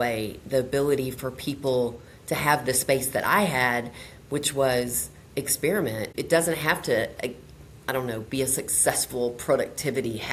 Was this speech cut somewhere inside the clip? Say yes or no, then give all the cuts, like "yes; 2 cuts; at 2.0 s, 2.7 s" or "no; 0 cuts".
no; 0 cuts